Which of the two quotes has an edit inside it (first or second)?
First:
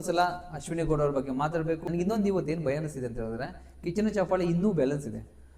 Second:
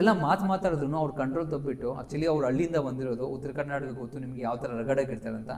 first